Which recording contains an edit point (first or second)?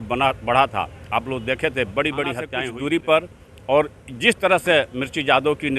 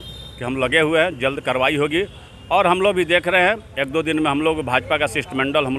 first